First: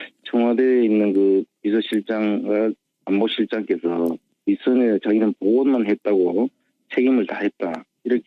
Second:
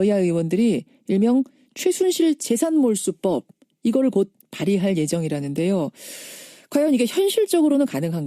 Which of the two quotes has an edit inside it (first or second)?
first